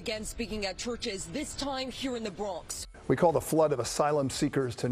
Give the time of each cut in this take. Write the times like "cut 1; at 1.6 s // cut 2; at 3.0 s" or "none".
cut 1; at 2.7 s